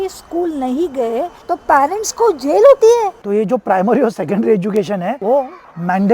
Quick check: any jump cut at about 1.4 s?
yes; 2 cuts; at 1.4 s, 3.2 s

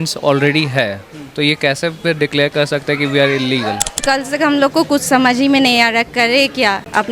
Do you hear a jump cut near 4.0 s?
yes; 1 cut; at 4.0 s

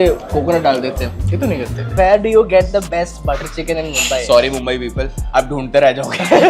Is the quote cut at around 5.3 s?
no; 1 cut; at 1.9 s

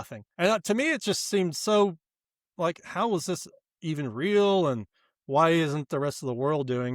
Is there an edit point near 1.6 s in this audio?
no; 0 cuts

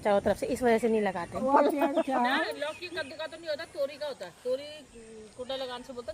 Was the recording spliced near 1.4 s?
yes; 1 cut; at 1.4 s

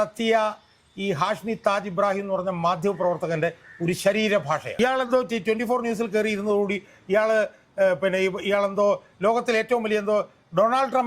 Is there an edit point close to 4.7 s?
yes; 1 cut; at 4.7 s

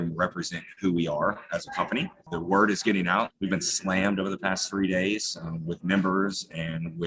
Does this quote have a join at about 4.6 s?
no; 2 cuts; at 2.2 s, 3.3 s

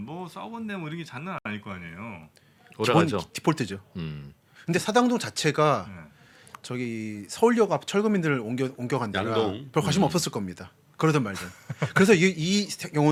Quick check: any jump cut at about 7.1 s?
no; 0 cuts

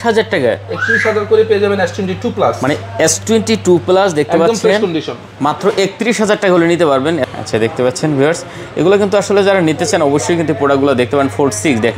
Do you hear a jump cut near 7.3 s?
yes; 1 cut; at 7.3 s

